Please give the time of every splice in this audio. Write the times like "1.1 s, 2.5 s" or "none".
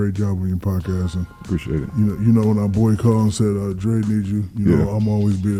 none